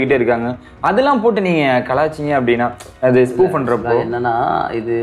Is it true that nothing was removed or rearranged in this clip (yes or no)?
yes